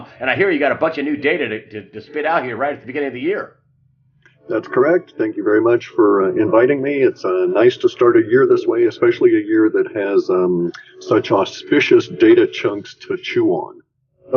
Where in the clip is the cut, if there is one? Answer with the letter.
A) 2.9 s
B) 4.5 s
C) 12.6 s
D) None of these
A